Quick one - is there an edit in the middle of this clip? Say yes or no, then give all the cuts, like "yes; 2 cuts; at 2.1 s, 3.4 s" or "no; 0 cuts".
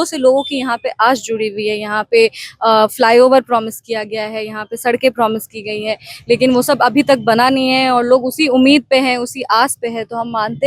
no; 0 cuts